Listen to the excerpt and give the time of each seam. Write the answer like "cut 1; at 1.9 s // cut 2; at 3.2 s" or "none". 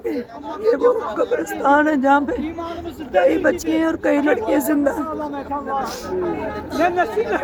none

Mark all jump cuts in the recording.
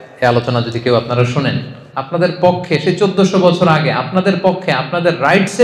cut 1; at 1.9 s

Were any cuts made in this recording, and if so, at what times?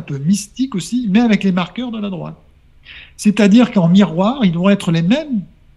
none

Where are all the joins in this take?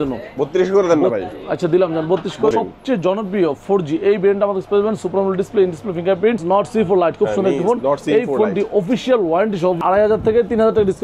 cut 1; at 2.5 s // cut 2; at 6.4 s // cut 3; at 9.8 s

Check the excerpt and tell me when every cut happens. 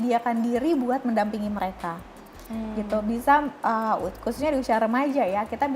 none

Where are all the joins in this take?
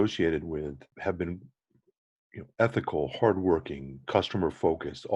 cut 1; at 0.9 s

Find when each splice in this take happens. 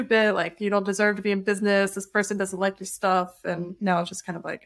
none

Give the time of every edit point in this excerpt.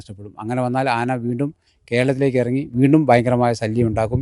none

